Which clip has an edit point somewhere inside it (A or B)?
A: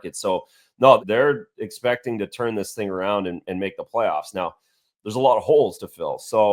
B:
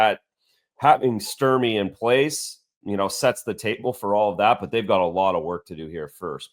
A